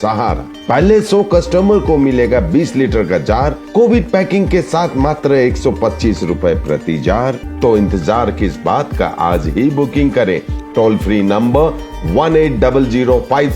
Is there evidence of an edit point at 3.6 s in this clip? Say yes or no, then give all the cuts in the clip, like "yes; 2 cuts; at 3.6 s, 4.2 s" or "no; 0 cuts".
no; 1 cut; at 7.4 s